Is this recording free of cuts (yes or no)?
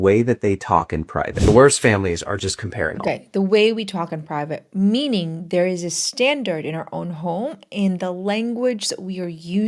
yes